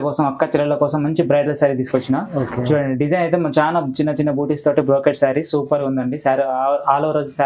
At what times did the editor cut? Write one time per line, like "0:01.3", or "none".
none